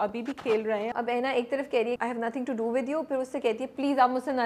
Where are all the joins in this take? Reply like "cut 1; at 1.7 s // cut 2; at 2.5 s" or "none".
cut 1; at 0.9 s // cut 2; at 2.0 s